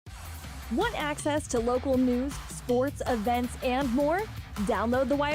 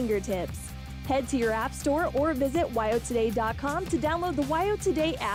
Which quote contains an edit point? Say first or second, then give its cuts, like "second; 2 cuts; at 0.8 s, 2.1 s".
first; 1 cut; at 1.2 s